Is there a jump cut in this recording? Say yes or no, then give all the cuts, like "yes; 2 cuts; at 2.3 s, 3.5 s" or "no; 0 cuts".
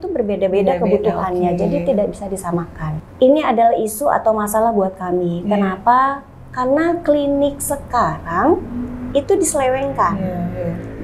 yes; 1 cut; at 2.8 s